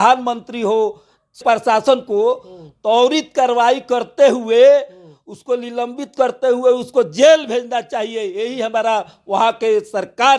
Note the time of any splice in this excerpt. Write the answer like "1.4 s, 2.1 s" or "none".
1.4 s